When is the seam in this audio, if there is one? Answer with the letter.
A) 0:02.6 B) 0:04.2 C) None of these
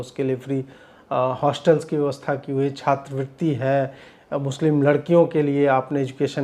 C